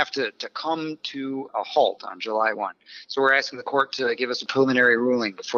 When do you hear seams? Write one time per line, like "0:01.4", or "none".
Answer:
0:01.5
0:04.5

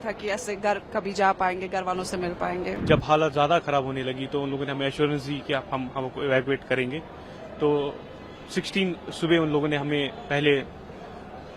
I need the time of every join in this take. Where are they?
0:02.8

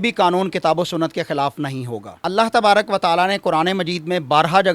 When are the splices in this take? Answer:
none

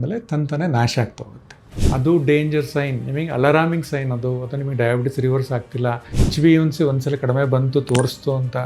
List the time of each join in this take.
0:01.7
0:06.2

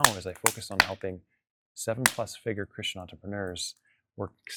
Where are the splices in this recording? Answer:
none

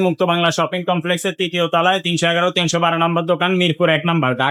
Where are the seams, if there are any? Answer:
none

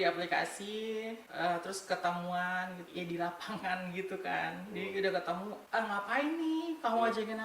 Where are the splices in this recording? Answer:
0:02.8

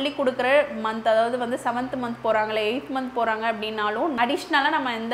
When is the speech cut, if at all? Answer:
none

